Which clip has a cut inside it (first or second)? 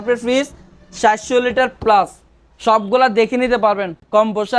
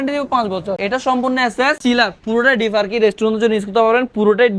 second